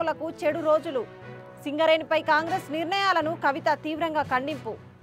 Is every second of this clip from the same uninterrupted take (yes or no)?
yes